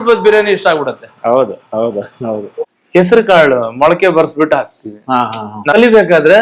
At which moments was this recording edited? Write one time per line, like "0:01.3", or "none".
0:02.7
0:05.7